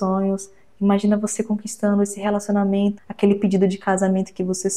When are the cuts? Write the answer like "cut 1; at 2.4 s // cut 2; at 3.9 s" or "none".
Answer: cut 1; at 3.0 s